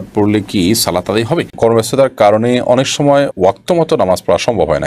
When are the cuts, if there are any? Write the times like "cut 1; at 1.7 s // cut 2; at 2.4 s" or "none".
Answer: cut 1; at 1.5 s